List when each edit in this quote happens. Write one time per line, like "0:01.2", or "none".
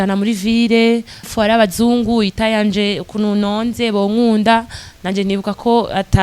0:01.3